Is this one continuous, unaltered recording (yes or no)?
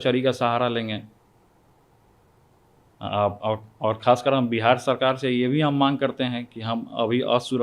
yes